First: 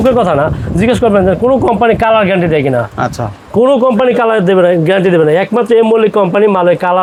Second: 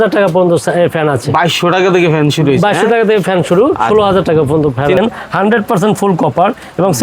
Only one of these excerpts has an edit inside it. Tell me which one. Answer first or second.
second